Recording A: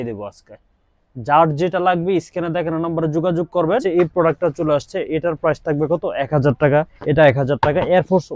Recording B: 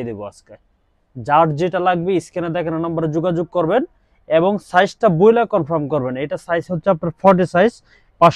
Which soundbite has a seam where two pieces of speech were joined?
A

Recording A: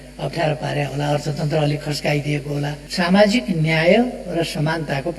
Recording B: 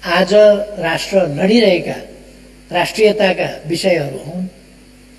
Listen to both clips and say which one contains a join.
A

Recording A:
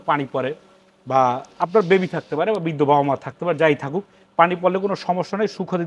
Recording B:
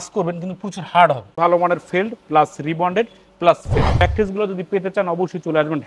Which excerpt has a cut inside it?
B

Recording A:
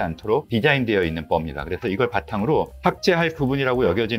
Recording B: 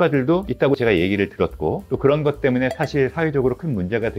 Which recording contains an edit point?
A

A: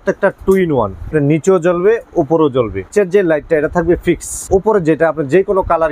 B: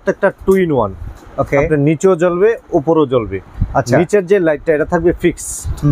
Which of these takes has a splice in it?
A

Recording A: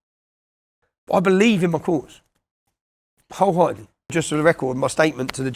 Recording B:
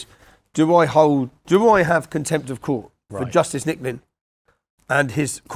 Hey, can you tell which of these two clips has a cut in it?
A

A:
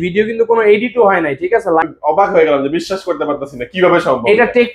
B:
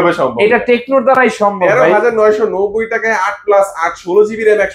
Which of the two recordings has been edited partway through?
A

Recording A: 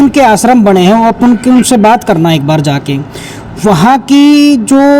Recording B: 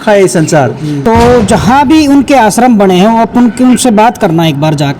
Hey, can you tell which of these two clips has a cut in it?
B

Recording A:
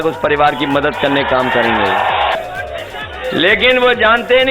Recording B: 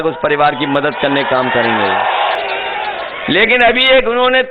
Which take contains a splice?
A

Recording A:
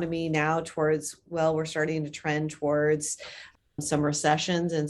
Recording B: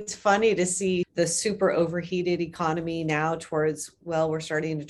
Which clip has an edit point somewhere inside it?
B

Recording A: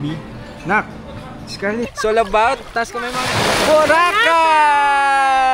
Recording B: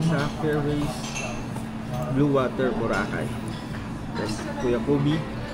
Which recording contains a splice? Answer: A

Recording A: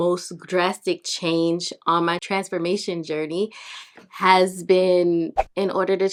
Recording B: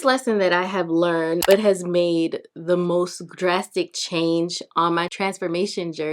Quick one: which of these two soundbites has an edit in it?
B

